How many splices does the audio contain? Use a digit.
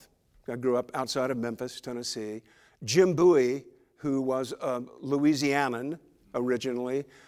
0